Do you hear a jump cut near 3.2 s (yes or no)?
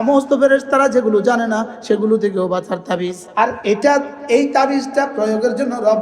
yes